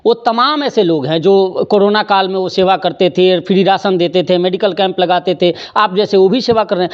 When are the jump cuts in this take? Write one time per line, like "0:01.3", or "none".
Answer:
none